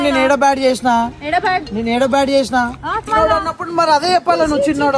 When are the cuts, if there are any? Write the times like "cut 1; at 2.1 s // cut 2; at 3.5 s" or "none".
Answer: cut 1; at 2.9 s